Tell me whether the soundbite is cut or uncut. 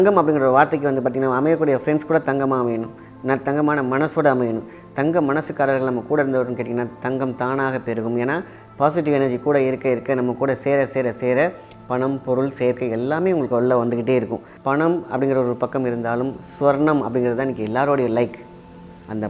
uncut